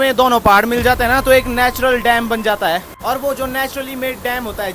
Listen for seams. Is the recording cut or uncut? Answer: cut